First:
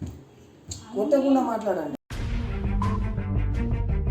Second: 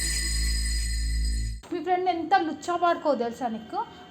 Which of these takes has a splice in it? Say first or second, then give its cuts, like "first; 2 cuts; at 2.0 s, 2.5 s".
second; 1 cut; at 1.5 s